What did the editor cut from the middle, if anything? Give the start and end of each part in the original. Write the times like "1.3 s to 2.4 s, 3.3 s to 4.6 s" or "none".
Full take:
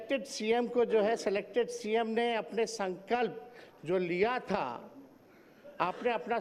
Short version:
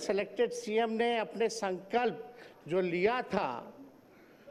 none

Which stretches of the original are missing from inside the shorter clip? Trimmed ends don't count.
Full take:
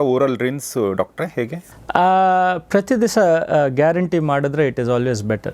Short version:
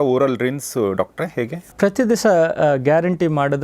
1.7 s to 2.6 s

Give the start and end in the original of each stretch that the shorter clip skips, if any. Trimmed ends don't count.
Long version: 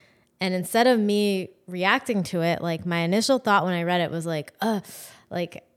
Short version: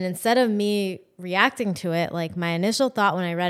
none

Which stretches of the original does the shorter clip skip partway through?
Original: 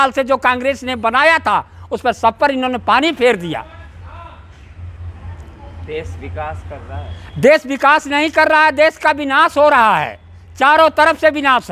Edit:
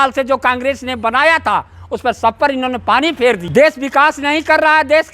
3.4 s to 7.3 s

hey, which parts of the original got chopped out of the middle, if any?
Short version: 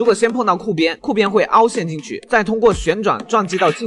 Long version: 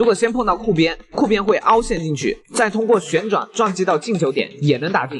1.0 s to 1.2 s, 2.3 s to 2.4 s

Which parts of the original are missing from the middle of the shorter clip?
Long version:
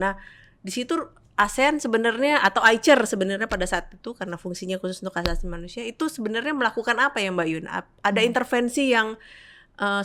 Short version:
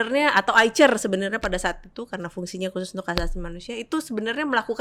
none

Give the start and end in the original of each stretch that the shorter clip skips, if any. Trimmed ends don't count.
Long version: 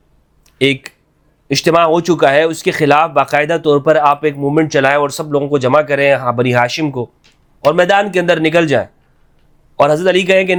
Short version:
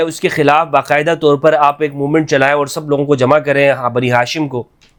none

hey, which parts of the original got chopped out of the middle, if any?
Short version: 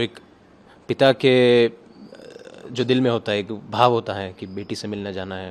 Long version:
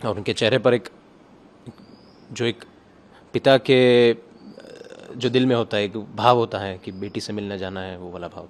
none

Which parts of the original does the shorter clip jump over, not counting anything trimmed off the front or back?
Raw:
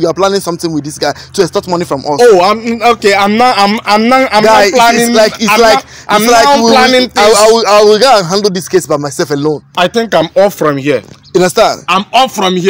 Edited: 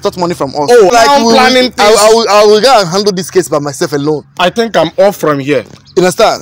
2.4 s to 6.3 s

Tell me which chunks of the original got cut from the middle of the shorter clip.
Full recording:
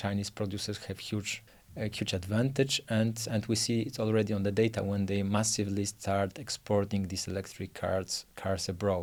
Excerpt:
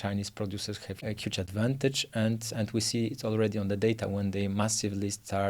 0.9 s to 1.7 s

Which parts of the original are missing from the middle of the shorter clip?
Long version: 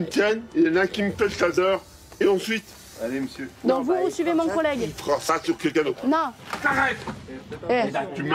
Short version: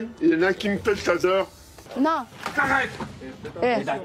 2.2 s to 5.9 s

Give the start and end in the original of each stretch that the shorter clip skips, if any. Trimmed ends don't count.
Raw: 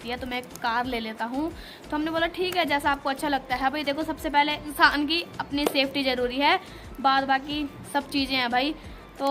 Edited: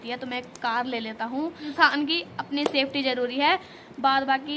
1.6 s to 4.6 s

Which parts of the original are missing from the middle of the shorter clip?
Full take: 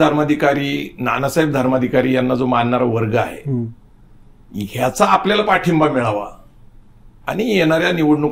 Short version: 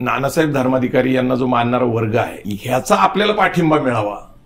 3.4 s to 4.5 s

